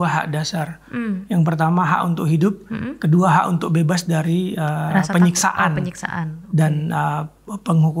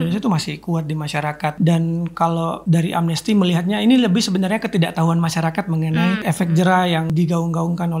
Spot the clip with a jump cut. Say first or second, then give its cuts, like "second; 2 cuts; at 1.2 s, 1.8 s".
second; 4 cuts; at 1.6 s, 2.6 s, 6.2 s, 7.1 s